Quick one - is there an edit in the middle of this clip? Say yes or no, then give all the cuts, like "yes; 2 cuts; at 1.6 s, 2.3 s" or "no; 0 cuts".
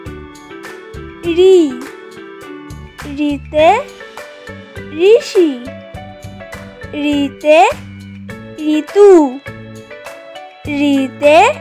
yes; 1 cut; at 1.2 s